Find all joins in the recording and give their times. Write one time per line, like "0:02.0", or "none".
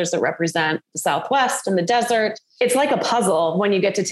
0:02.4